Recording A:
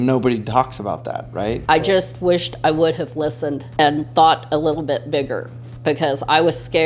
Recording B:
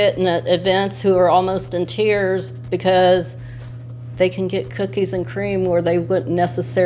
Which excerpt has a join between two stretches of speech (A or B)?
A